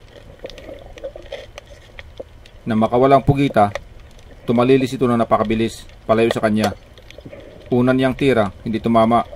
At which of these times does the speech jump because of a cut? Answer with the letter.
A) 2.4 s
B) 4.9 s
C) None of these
A